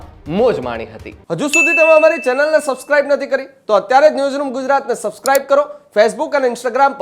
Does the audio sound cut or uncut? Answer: cut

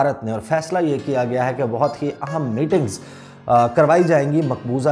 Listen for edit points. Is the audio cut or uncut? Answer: uncut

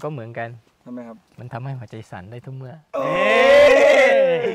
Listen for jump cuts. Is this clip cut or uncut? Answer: uncut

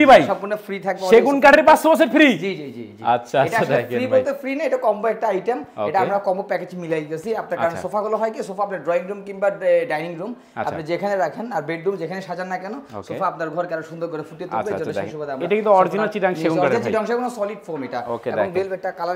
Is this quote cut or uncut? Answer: uncut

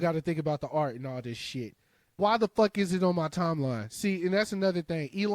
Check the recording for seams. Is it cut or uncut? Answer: cut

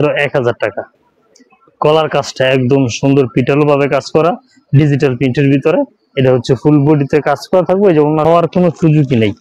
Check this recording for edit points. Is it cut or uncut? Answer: cut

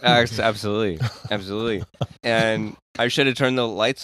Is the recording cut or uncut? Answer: cut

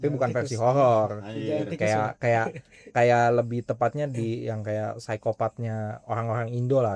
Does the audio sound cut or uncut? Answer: uncut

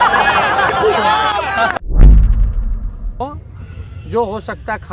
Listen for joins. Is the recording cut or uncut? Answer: uncut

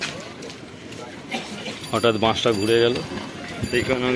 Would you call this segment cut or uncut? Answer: uncut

